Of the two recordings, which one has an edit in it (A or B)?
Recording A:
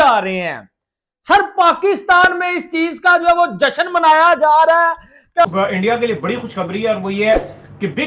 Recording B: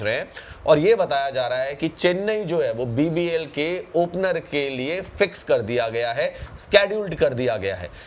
A